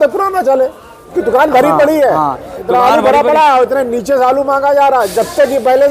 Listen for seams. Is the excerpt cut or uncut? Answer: cut